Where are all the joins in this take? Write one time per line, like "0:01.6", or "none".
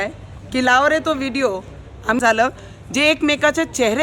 0:02.2